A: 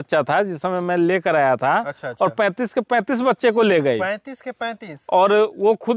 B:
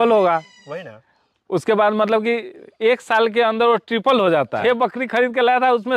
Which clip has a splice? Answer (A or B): B